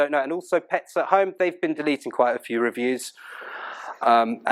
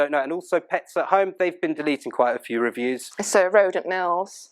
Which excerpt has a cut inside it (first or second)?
second